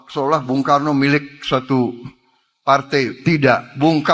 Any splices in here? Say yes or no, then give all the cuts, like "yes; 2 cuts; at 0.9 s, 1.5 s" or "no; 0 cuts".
no; 0 cuts